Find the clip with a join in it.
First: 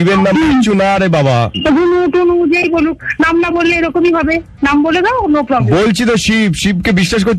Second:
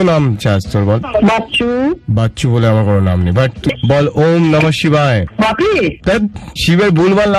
second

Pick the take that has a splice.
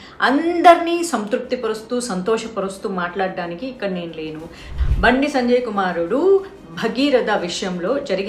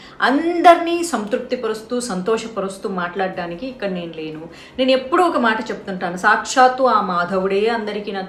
first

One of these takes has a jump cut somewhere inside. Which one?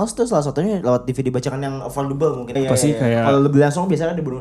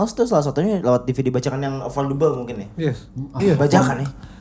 first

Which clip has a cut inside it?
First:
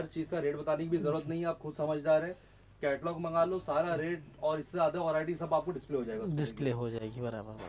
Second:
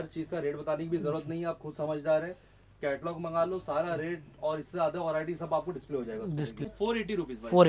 second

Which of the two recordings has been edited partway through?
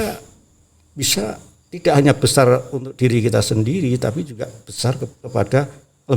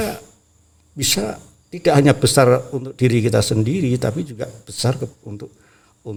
first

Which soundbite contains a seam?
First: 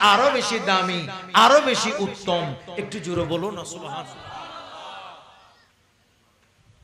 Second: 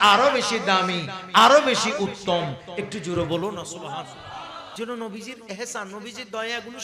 second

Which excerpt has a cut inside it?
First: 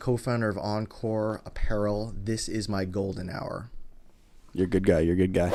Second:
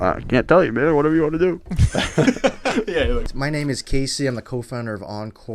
second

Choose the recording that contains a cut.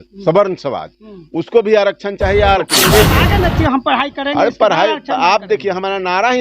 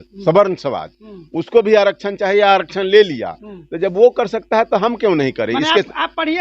first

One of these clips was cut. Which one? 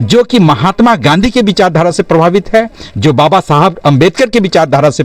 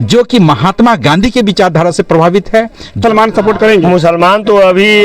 second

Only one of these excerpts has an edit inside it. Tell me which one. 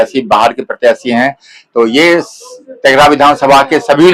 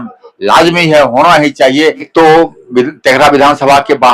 second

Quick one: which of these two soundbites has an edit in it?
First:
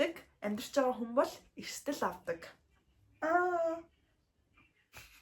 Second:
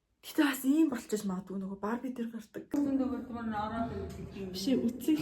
second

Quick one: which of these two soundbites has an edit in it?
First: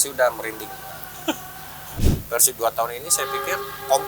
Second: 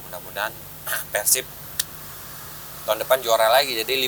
first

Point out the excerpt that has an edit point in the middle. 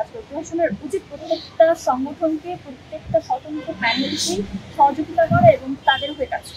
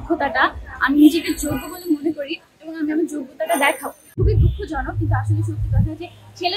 second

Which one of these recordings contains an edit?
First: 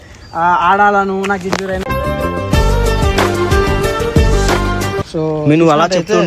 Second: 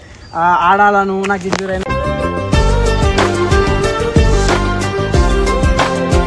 first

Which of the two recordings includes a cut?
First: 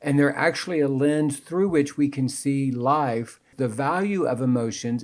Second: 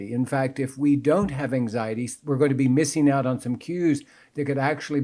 first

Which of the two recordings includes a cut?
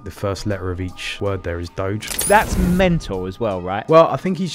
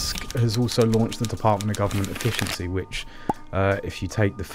first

